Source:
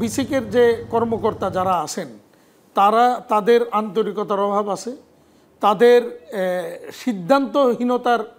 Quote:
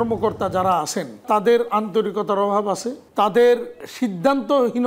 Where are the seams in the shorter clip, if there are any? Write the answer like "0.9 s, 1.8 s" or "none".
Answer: 1.2 s, 3.0 s, 3.8 s